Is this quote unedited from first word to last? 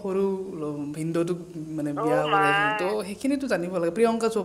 yes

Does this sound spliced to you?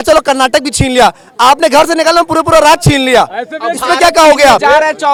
no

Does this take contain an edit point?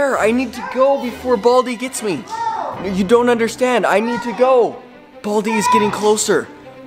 no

